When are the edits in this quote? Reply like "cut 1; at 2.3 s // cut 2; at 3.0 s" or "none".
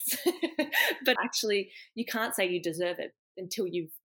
cut 1; at 1.1 s